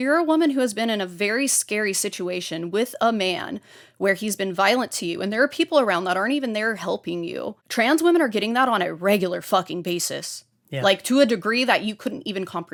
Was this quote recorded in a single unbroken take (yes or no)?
yes